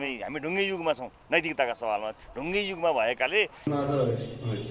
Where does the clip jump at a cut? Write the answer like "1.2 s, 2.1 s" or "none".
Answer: 3.7 s